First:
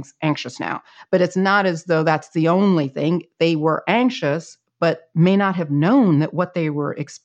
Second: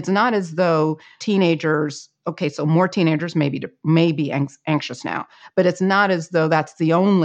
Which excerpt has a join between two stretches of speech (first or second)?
second